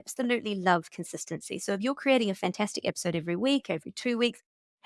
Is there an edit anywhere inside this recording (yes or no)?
no